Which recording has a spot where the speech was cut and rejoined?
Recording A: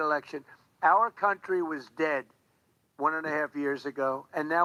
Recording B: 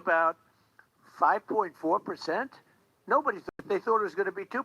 B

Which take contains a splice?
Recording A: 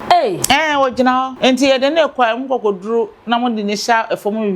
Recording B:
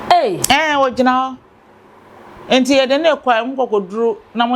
A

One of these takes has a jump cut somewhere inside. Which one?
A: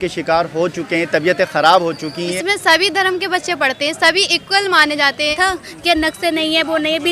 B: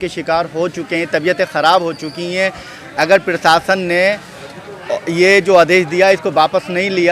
A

